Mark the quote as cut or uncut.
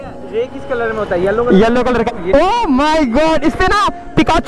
cut